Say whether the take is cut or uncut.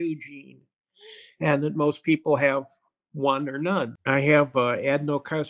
cut